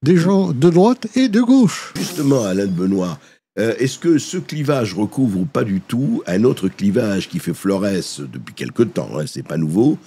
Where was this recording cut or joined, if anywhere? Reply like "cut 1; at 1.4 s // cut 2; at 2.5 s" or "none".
cut 1; at 2.0 s